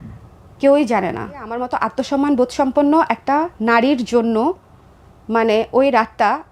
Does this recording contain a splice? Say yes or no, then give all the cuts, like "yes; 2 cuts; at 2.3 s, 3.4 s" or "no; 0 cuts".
yes; 1 cut; at 1.7 s